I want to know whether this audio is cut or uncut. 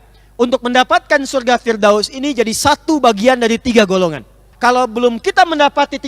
cut